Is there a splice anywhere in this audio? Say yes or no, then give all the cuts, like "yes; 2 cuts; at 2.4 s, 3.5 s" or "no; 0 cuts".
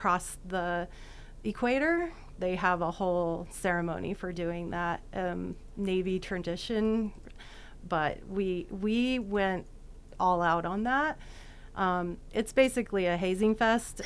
no; 0 cuts